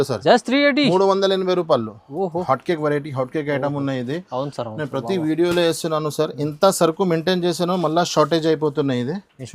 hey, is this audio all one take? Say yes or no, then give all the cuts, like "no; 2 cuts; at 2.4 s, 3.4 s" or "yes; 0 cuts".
no; 1 cut; at 2.4 s